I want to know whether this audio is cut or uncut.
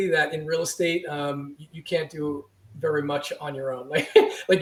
uncut